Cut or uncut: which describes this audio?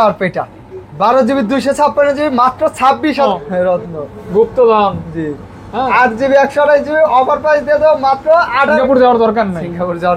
cut